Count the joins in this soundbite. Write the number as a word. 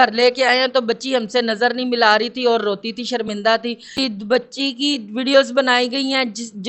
one